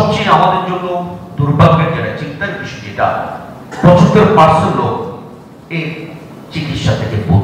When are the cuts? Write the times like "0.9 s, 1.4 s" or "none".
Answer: none